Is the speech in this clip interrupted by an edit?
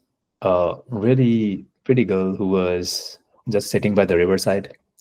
no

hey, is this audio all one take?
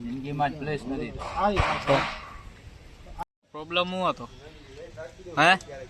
no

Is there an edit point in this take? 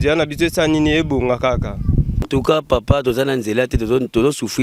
yes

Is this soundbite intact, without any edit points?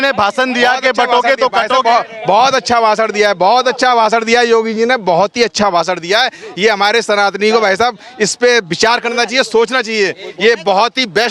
yes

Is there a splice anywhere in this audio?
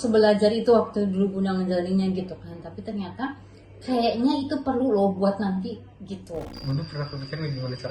yes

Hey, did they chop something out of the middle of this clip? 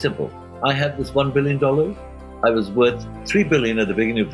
no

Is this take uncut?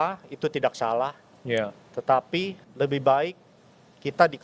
no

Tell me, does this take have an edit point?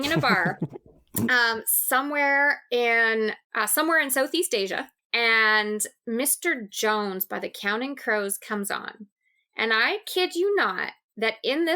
yes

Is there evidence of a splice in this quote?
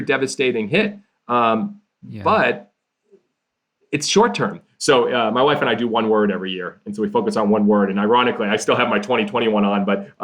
yes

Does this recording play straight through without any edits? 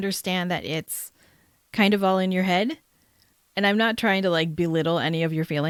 yes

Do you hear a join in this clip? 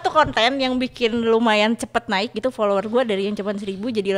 no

